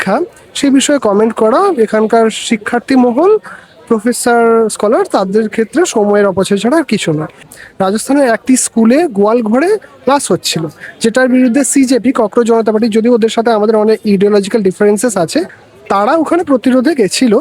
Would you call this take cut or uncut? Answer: cut